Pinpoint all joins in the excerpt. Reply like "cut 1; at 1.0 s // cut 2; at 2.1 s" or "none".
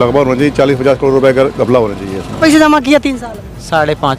cut 1; at 2.4 s

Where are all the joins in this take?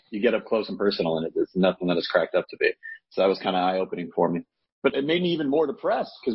cut 1; at 4.9 s

